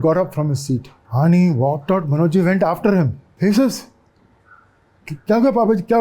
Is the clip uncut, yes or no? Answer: no